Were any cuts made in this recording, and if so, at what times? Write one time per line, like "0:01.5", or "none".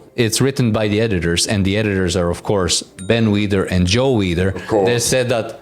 none